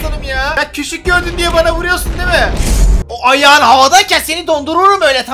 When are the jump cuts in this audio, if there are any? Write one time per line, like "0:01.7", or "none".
none